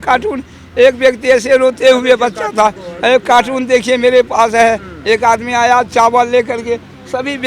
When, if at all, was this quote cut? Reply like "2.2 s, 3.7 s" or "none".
none